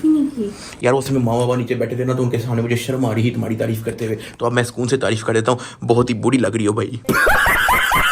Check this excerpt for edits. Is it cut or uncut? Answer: uncut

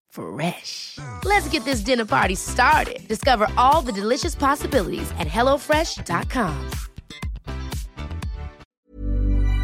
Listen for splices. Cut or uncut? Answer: cut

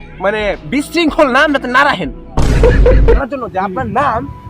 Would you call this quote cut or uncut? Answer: cut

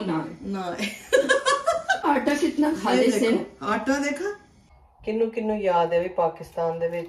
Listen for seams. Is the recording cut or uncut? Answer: cut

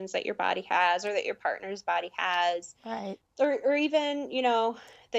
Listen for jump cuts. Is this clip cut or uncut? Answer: cut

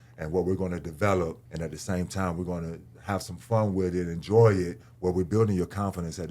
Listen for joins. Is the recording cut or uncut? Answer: cut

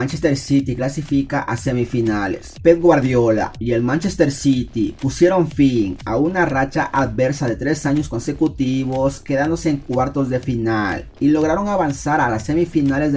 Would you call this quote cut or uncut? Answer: uncut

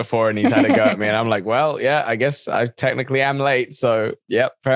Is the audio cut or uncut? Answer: uncut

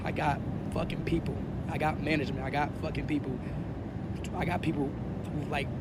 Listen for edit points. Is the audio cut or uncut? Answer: uncut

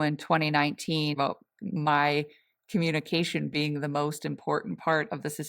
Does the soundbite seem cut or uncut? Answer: cut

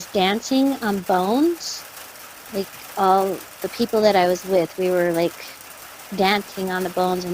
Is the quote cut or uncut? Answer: uncut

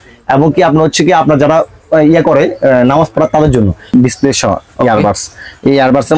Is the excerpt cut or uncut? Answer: cut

